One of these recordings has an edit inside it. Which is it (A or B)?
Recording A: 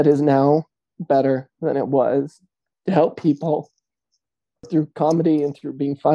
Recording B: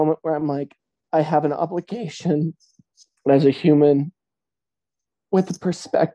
A